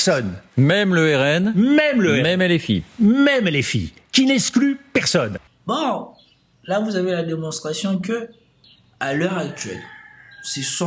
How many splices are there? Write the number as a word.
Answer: one